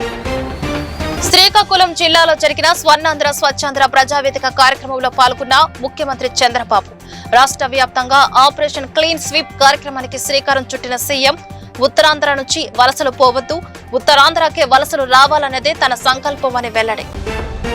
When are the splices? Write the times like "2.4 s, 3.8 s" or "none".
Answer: 1.2 s